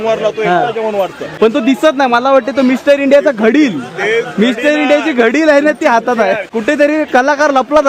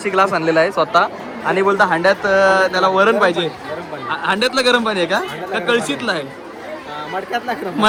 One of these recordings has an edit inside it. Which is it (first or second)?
first